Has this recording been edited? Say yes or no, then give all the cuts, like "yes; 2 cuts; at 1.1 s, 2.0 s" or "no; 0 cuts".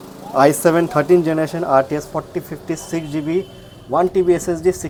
no; 0 cuts